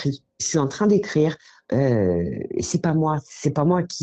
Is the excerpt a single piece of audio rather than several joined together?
yes; 0 cuts

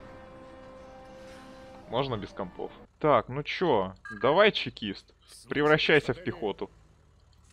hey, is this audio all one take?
no; 1 cut; at 2.8 s

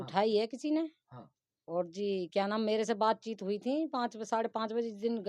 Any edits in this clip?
no; 0 cuts

